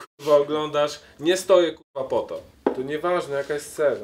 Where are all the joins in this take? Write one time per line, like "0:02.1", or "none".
0:02.5